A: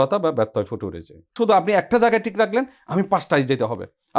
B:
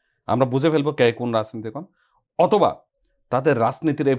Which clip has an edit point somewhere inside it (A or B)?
A